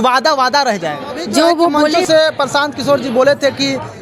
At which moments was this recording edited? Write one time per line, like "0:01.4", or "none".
0:02.0